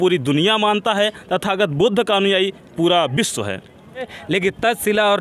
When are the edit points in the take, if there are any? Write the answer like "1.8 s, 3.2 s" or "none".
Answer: 4.2 s